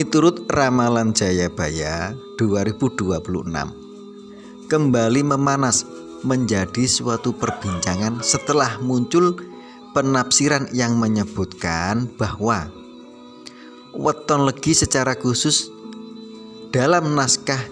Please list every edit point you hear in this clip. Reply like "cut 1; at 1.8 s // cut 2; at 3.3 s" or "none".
none